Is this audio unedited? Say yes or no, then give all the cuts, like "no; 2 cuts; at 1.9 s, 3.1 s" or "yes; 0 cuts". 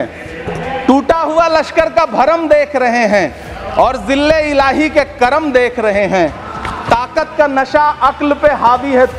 yes; 0 cuts